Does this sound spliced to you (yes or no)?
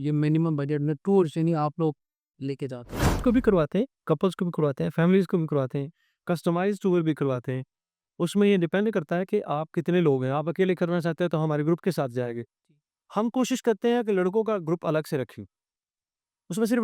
yes